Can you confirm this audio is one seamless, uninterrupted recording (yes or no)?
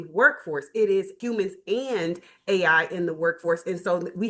no